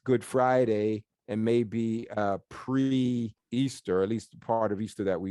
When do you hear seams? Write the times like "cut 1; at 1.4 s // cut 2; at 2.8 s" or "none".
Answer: cut 1; at 1.2 s // cut 2; at 3.4 s

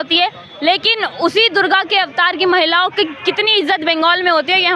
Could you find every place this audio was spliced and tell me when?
none

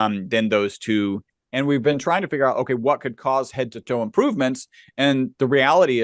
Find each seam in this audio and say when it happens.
cut 1; at 1.3 s

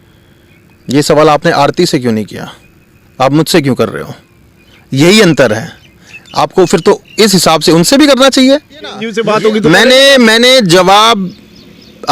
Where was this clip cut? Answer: cut 1; at 9.1 s

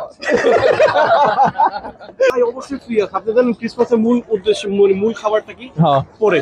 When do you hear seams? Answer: cut 1; at 2.3 s

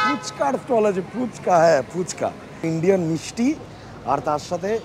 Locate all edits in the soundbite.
cut 1; at 2.7 s

